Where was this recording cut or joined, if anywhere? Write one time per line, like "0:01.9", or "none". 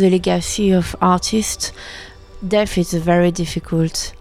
0:02.3

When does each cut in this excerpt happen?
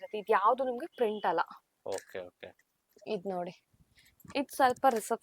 none

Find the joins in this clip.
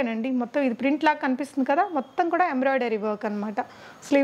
none

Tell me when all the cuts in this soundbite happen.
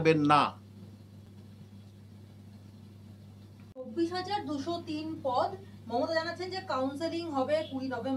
none

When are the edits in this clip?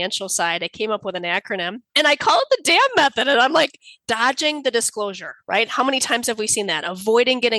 0:01.8
0:04.0

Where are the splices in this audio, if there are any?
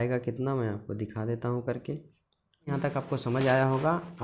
0:02.7

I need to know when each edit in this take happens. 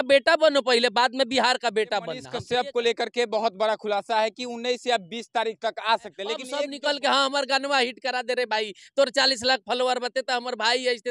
0:02.3
0:06.5

